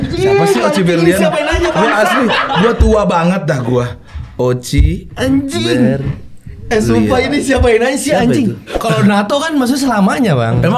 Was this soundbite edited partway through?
yes; 1 cut; at 8.7 s

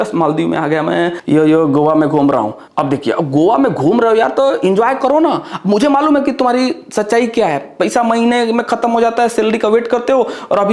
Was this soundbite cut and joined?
no; 0 cuts

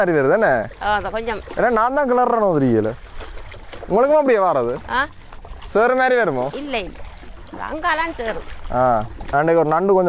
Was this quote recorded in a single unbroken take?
no; 1 cut; at 9.2 s

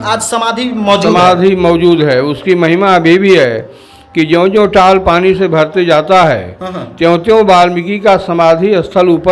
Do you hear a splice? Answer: no; 0 cuts

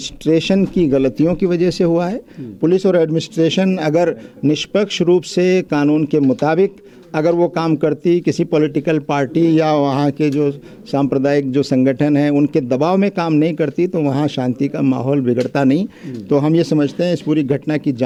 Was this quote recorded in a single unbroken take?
yes; 0 cuts

